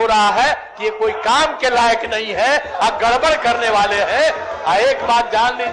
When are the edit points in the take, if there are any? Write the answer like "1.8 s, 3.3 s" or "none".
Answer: none